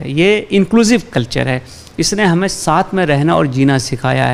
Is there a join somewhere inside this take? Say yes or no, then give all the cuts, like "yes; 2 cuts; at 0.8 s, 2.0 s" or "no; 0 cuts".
no; 0 cuts